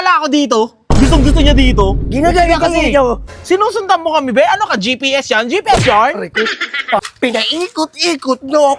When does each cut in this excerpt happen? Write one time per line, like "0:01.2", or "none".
0:03.3
0:07.0